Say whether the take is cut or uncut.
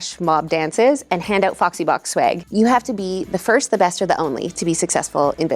cut